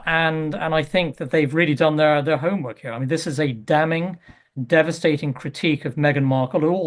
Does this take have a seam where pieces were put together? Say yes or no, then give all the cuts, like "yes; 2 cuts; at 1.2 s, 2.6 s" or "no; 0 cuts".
yes; 1 cut; at 5.9 s